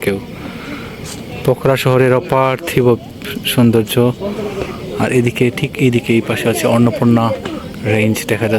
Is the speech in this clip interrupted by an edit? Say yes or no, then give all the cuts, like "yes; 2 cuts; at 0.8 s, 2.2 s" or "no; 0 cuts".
no; 0 cuts